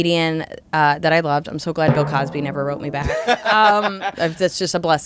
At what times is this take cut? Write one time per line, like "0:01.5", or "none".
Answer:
none